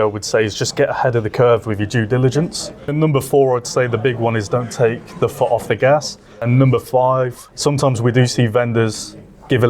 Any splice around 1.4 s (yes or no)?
no